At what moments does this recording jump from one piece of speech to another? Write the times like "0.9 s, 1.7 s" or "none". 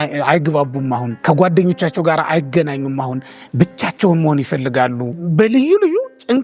1.1 s, 5.2 s